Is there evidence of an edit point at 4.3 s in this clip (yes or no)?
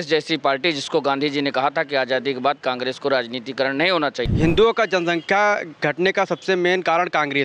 yes